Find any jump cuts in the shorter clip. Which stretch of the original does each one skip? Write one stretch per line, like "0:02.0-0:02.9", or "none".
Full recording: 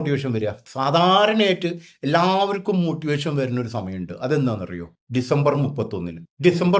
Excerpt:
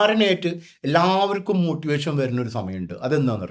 none

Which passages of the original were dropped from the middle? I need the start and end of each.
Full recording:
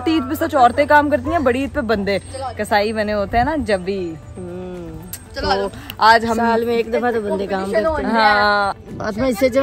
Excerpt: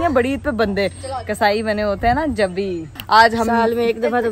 0:04.2-0:05.8

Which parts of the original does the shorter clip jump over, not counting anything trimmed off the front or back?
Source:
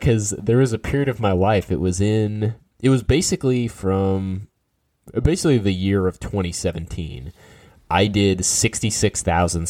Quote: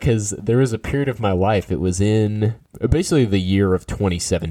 0:02.6-0:05.0

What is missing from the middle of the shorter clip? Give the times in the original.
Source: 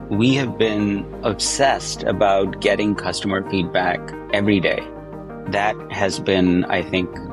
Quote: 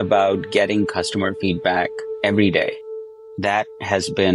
none

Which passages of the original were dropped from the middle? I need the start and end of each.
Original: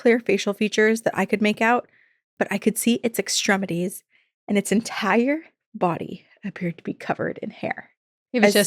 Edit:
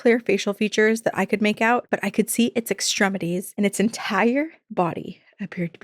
0:01.8-0:02.3
0:04.0-0:04.4
0:05.5-0:05.6

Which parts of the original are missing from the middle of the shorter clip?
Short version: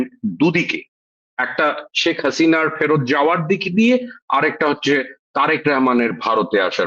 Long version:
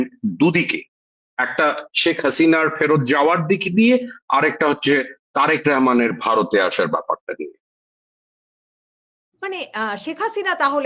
none

